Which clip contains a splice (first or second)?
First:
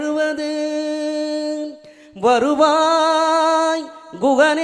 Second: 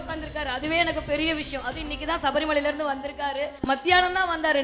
second